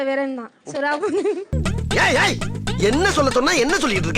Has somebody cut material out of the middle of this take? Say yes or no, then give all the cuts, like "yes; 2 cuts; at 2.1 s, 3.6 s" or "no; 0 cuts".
yes; 1 cut; at 1.5 s